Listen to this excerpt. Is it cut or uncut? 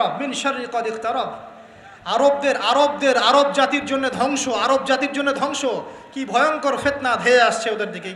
uncut